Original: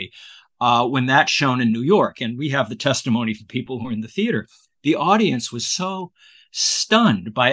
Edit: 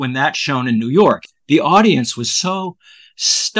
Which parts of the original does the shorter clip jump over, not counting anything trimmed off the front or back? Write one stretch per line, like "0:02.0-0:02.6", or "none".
0:02.2-0:04.7